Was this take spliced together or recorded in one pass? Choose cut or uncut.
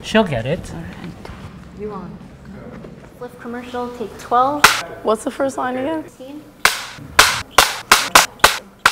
cut